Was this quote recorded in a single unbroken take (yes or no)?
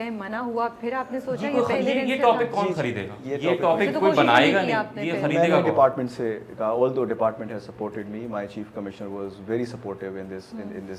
yes